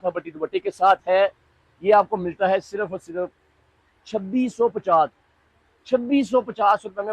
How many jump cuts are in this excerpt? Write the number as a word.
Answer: zero